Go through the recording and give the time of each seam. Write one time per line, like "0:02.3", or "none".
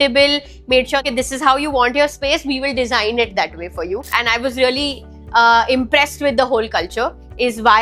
0:01.0
0:04.2